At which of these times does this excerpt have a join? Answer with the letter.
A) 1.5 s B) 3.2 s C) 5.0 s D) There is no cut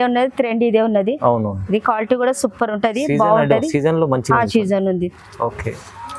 D